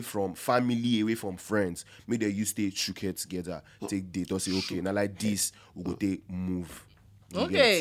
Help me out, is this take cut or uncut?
uncut